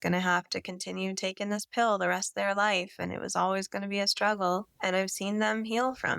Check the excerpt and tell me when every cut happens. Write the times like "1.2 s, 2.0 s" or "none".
4.7 s